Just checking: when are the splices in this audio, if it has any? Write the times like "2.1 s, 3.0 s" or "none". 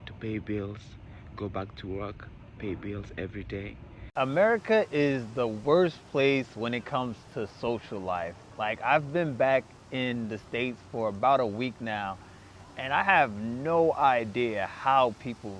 4.1 s